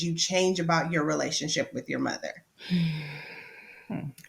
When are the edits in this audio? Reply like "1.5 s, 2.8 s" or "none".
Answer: 2.5 s